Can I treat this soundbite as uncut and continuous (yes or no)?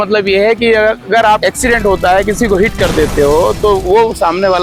yes